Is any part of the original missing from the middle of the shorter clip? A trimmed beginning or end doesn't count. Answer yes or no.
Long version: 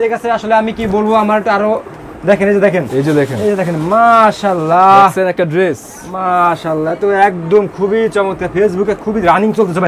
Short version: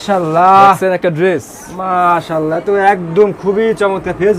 no